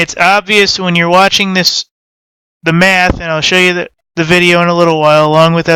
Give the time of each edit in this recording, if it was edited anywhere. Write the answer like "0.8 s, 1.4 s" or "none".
none